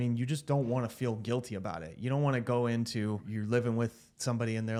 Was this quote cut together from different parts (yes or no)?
no